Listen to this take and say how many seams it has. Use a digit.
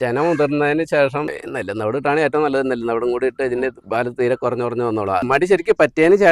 2